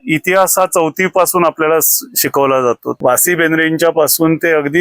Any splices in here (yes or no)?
yes